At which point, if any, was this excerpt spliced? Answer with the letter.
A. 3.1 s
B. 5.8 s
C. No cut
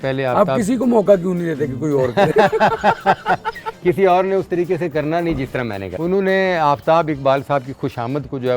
B